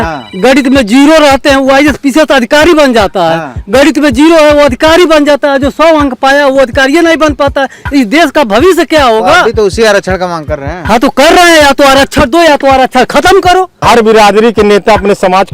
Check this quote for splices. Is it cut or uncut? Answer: cut